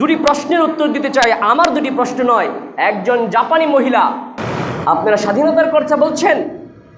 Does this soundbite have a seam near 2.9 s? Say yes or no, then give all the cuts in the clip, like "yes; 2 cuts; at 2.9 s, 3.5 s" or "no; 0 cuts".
no; 1 cut; at 4.3 s